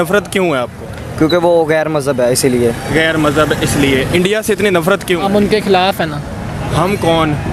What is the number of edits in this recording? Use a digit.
0